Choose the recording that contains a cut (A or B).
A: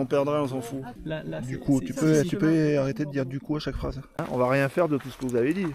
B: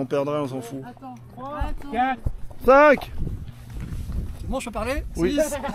A